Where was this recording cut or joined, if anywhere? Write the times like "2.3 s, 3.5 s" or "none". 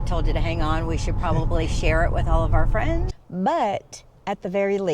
3.2 s